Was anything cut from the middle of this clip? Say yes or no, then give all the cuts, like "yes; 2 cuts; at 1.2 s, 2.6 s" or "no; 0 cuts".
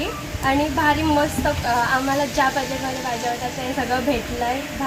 no; 0 cuts